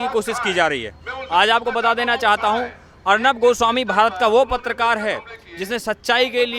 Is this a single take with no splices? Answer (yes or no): yes